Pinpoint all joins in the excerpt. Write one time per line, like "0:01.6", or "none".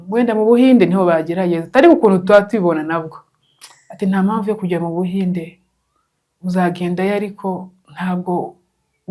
none